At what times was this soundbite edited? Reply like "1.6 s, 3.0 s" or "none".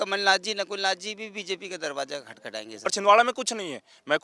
2.9 s